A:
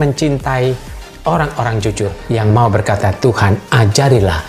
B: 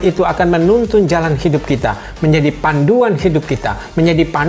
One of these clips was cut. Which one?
A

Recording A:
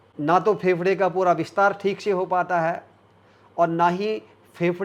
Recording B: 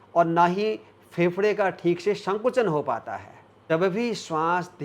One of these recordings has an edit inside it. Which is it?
B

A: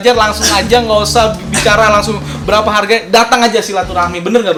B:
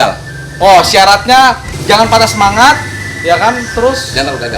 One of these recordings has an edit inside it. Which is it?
B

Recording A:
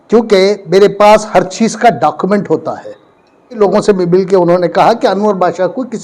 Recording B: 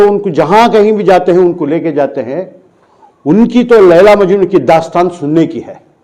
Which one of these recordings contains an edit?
A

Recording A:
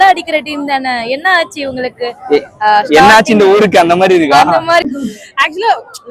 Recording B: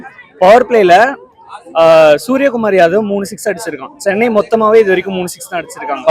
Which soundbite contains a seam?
A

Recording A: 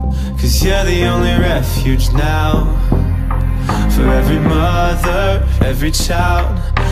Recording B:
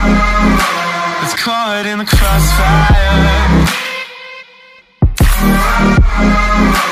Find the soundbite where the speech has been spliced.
B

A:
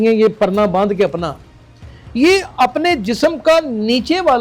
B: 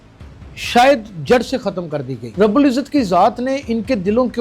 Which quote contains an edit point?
B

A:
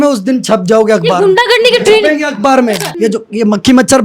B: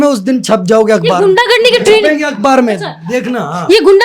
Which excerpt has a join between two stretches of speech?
A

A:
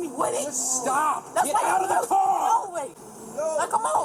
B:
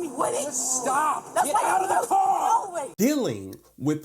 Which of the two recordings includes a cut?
B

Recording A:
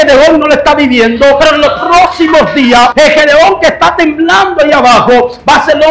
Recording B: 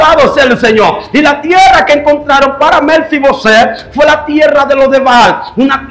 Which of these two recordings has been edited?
A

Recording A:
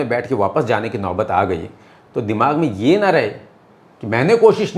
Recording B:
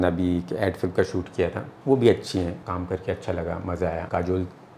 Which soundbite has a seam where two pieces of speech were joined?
B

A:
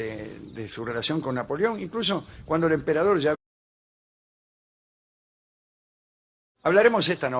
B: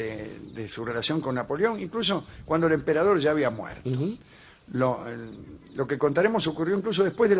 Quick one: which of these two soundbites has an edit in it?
B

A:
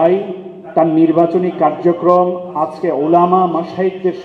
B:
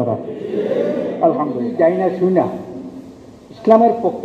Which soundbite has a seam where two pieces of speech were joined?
B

